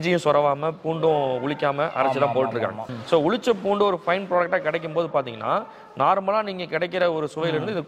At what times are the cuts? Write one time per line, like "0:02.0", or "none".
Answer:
0:02.9